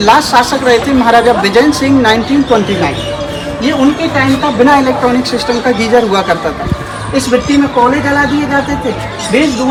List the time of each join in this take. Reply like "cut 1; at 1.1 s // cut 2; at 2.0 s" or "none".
none